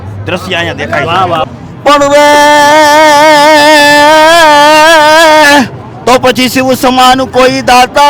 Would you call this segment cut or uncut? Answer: cut